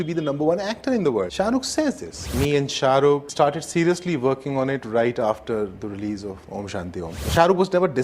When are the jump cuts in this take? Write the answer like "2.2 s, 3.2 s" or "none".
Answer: 1.3 s, 2.3 s, 7.2 s

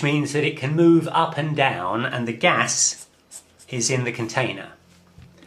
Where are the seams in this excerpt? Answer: none

